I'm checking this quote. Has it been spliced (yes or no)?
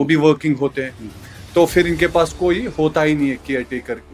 no